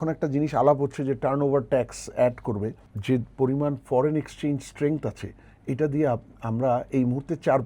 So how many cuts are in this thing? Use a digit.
1